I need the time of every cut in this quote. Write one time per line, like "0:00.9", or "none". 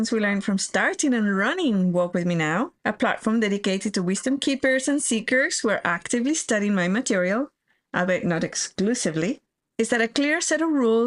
0:02.7
0:09.6